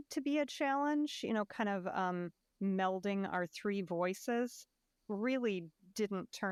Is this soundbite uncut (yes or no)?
yes